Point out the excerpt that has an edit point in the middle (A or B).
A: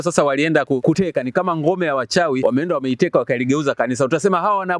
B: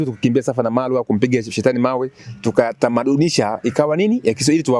A